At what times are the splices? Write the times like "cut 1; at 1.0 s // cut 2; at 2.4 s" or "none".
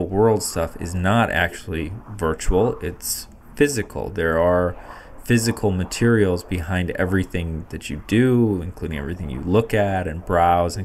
none